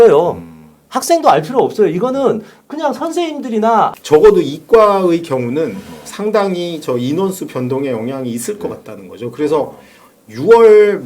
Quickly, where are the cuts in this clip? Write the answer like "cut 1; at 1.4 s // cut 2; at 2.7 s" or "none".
cut 1; at 3.9 s